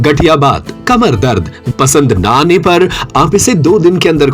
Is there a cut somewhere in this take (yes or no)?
yes